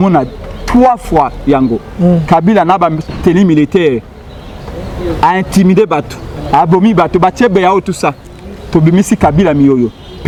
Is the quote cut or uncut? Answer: uncut